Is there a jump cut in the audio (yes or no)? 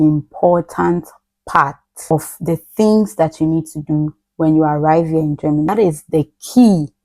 yes